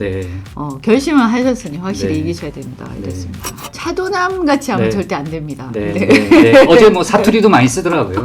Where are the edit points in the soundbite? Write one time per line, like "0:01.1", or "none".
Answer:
0:03.7